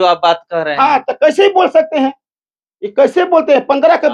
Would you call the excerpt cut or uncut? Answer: uncut